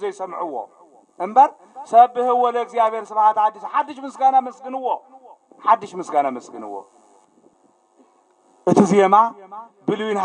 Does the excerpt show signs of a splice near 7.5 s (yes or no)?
yes